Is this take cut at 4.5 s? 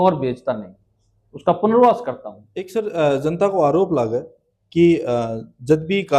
no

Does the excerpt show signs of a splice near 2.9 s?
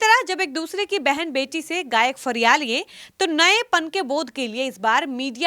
no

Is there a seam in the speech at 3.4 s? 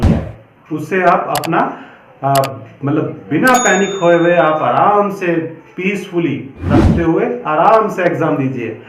no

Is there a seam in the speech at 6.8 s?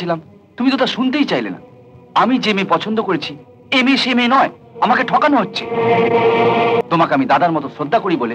yes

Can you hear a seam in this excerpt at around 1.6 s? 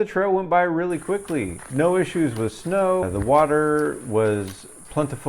yes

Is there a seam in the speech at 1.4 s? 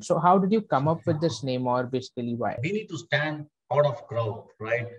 no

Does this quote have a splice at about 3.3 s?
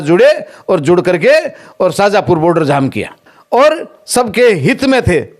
yes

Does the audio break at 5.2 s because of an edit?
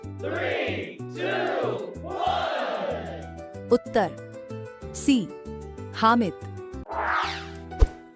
no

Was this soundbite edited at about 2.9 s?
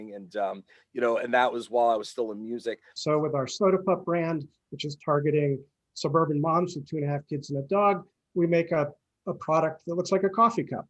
yes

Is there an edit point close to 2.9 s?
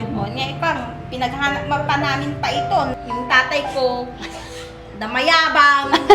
yes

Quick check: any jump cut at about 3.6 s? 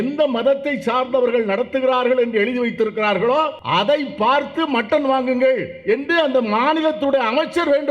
yes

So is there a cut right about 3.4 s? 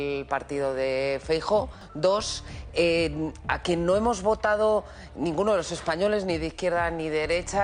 no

